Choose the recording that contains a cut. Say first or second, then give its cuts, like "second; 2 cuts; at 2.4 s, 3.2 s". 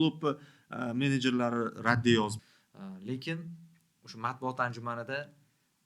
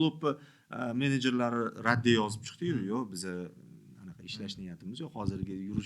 first; 1 cut; at 2.5 s